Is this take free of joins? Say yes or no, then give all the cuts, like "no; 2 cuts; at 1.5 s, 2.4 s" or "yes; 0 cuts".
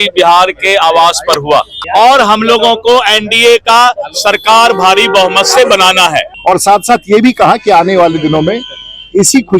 no; 2 cuts; at 1.8 s, 6.3 s